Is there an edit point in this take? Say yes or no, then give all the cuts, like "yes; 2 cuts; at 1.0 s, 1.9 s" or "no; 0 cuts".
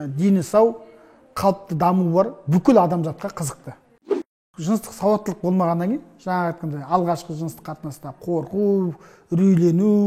yes; 1 cut; at 4.1 s